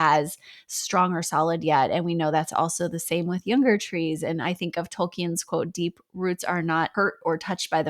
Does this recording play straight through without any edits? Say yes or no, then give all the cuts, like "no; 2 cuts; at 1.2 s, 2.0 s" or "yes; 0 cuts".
no; 1 cut; at 6.9 s